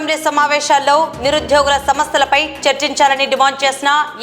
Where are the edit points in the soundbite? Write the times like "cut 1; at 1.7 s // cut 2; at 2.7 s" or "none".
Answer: none

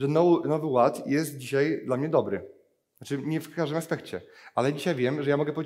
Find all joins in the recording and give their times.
none

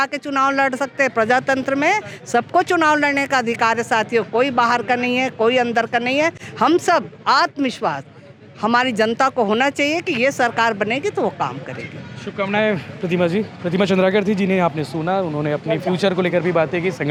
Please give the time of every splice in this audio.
none

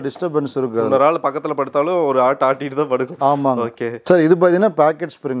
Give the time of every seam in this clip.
none

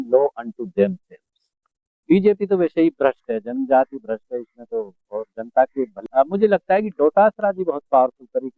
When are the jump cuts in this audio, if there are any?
cut 1; at 5.9 s

